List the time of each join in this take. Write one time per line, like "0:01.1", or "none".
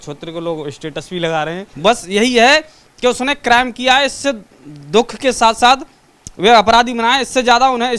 0:01.7